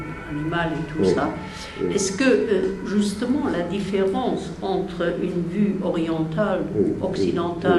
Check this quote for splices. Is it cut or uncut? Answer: uncut